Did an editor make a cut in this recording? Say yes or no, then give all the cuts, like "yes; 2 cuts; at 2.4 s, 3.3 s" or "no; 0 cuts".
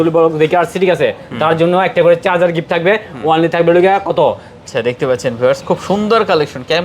yes; 1 cut; at 4.6 s